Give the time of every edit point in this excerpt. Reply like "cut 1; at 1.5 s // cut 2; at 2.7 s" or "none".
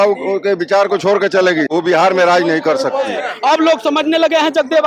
cut 1; at 1.7 s // cut 2; at 3.3 s